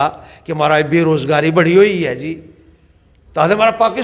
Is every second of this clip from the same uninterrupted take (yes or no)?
yes